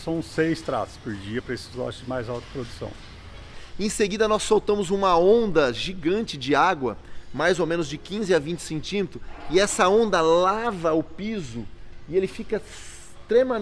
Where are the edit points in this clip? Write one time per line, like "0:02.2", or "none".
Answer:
0:03.5